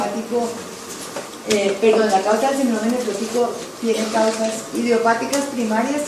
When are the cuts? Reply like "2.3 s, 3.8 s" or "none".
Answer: none